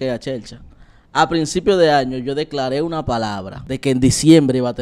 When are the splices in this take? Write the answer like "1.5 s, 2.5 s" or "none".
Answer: 3.5 s